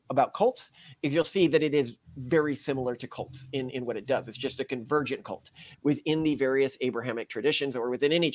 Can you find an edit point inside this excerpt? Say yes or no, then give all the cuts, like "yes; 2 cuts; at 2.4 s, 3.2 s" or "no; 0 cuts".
yes; 1 cut; at 5.7 s